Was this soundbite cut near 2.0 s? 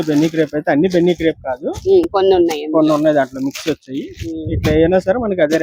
no; 0 cuts

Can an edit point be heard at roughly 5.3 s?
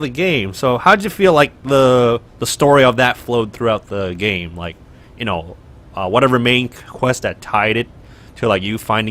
yes; 1 cut; at 5.3 s

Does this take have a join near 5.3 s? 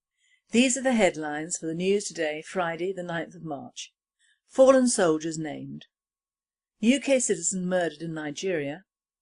yes; 1 cut; at 5.3 s

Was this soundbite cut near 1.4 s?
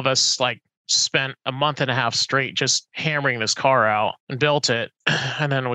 no; 3 cuts; at 2.9 s, 4.2 s, 5.0 s

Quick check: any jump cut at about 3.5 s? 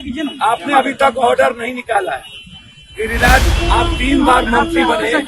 yes; 1 cut; at 3.5 s

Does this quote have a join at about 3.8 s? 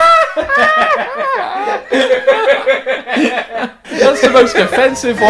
yes; 1 cut; at 3.8 s

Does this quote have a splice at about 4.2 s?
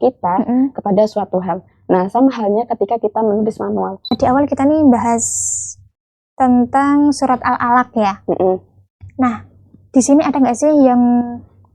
yes; 1 cut; at 4.2 s

